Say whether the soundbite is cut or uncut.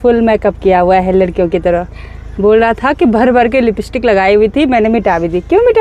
uncut